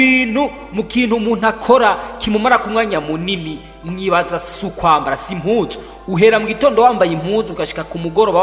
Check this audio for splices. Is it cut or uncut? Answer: uncut